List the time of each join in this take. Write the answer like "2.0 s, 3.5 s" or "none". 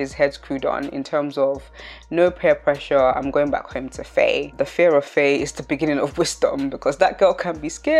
none